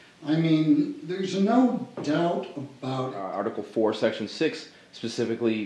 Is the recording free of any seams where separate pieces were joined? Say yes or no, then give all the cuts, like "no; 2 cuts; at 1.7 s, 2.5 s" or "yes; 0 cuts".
no; 1 cut; at 3.2 s